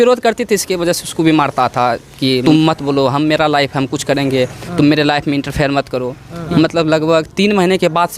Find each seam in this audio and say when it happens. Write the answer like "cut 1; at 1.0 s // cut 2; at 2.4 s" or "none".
cut 1; at 2.4 s // cut 2; at 6.4 s

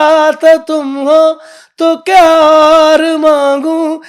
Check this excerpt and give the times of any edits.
none

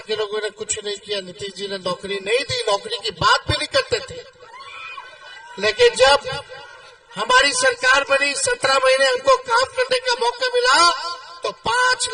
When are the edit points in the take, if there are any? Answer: none

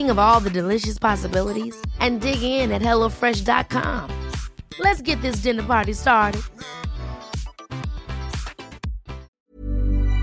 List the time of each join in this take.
cut 1; at 9.3 s

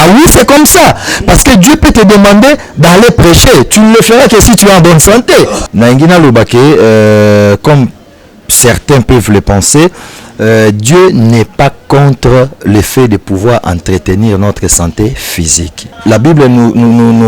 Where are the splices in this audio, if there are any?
cut 1; at 5.6 s // cut 2; at 15.9 s

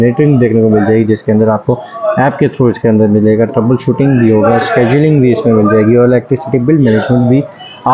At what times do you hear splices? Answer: none

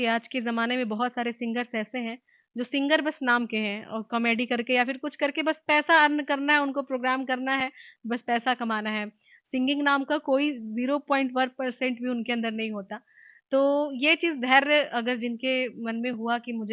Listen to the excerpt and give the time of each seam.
none

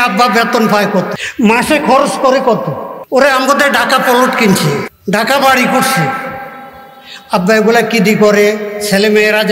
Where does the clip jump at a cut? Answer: cut 1; at 1.2 s // cut 2; at 2.9 s // cut 3; at 4.9 s

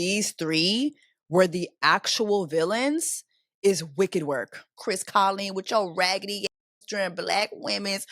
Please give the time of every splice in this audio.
cut 1; at 4.8 s

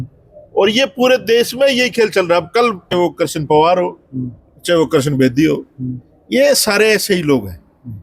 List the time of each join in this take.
cut 1; at 2.9 s

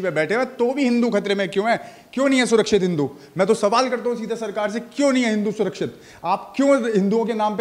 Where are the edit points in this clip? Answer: none

